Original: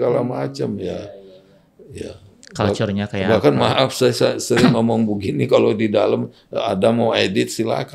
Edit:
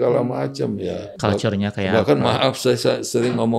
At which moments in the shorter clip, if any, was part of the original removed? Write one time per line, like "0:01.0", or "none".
0:01.1